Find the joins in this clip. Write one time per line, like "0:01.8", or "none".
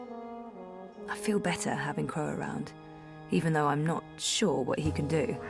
0:01.2